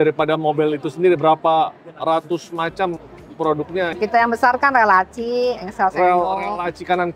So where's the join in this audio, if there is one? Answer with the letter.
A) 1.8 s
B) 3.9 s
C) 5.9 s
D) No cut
D